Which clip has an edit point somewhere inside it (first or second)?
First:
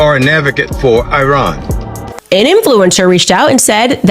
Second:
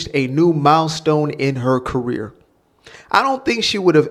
first